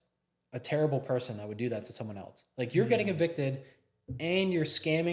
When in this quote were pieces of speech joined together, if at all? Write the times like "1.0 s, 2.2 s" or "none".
none